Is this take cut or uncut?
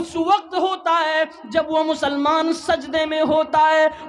uncut